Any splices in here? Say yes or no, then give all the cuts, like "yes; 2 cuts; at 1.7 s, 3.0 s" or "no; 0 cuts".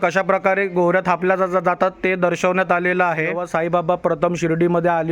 yes; 1 cut; at 3.4 s